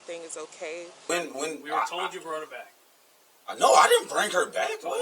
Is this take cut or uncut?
cut